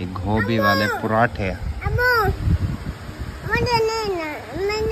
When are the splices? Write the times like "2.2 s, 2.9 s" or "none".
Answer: none